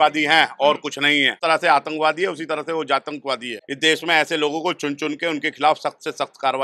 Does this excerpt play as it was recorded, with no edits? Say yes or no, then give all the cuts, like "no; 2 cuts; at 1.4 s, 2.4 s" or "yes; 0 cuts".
no; 2 cuts; at 1.4 s, 3.6 s